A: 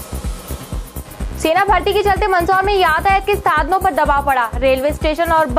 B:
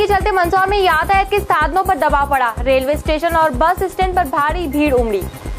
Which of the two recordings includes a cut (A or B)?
A